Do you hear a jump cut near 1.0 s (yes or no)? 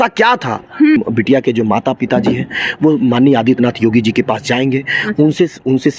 yes